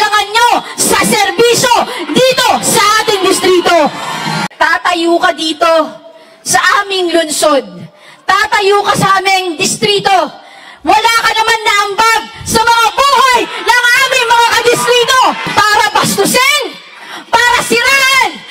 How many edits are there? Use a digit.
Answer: 2